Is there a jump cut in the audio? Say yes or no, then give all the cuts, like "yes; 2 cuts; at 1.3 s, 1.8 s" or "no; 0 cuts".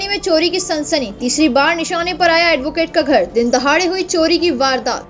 no; 0 cuts